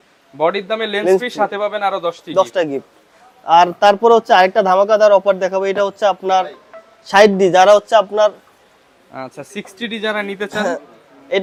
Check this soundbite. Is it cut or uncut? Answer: uncut